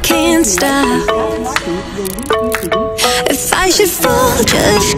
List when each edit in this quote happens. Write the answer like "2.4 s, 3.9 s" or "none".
none

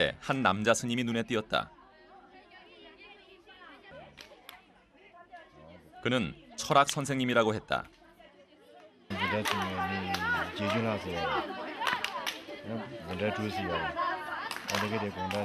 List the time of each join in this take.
1.2 s

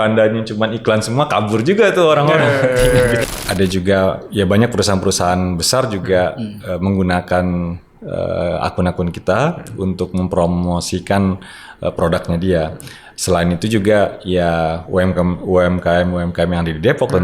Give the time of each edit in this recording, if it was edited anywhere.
3.2 s

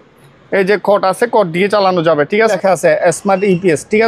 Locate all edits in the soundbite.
2.5 s

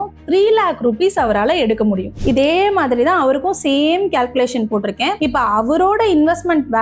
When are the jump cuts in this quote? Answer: 2.2 s

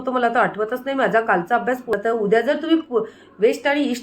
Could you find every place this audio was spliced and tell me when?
1.9 s

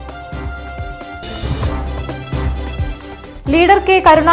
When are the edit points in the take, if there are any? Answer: none

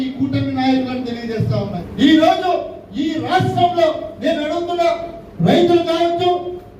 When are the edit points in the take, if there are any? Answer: 1.7 s

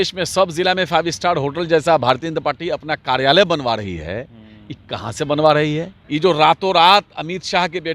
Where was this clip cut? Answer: 6.0 s

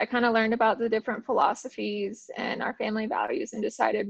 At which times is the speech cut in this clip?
none

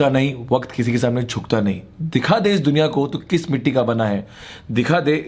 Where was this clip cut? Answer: none

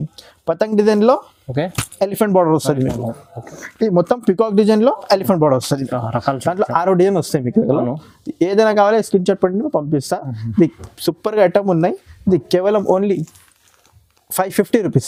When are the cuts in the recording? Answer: none

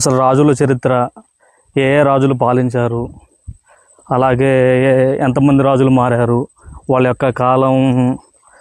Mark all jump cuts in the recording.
none

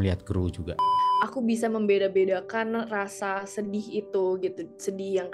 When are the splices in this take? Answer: 0.9 s

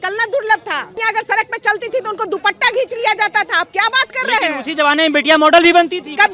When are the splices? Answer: 1.0 s

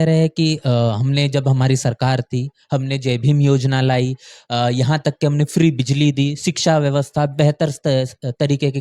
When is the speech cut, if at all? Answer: none

